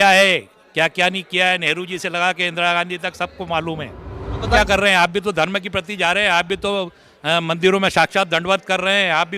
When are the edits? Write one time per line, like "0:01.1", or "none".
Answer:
0:04.6